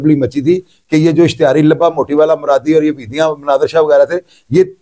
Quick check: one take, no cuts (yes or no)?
yes